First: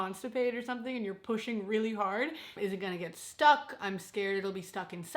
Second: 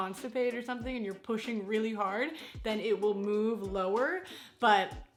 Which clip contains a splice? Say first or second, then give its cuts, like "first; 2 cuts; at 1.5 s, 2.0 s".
first; 1 cut; at 2.5 s